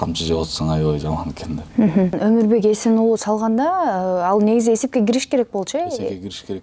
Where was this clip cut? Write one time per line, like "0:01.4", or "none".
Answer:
0:02.2